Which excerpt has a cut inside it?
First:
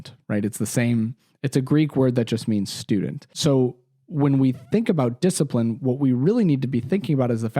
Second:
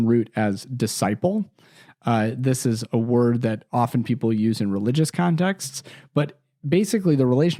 first; 1 cut; at 3.3 s

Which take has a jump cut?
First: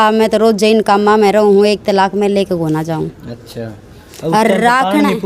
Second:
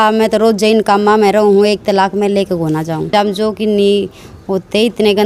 second; 1 cut; at 3.1 s

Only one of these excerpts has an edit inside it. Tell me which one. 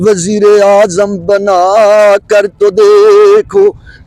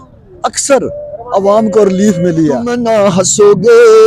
second; 1 cut; at 2.7 s

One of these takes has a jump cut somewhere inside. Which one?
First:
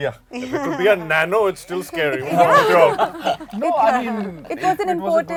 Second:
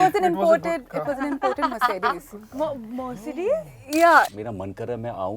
second; 1 cut; at 4.4 s

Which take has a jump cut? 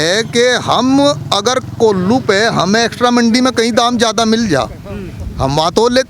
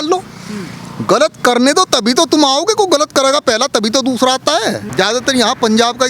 second; 1 cut; at 4.8 s

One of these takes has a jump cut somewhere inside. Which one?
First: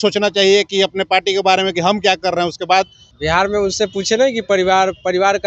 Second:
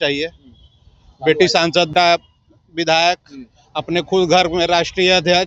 first; 1 cut; at 3.0 s

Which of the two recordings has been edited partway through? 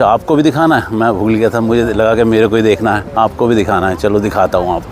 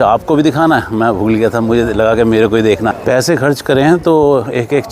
second; 1 cut; at 3.0 s

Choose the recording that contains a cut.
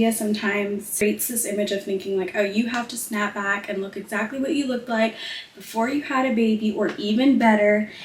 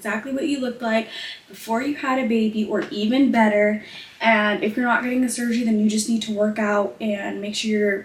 first; 1 cut; at 1.0 s

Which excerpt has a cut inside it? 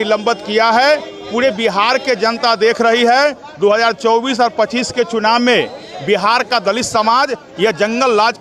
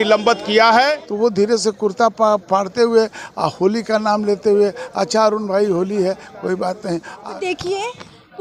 second; 2 cuts; at 1.0 s, 7.2 s

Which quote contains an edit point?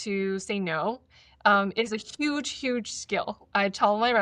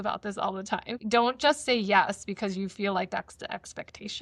second; 1 cut; at 0.9 s

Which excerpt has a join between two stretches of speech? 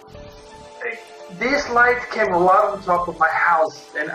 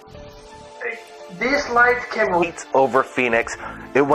first; 1 cut; at 2.4 s

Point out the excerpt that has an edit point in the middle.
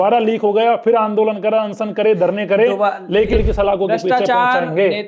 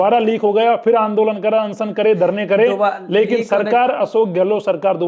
first; 1 cut; at 3.3 s

